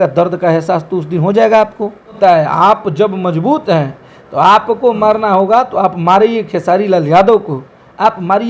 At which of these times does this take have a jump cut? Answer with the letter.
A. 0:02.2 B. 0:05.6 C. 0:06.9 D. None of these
A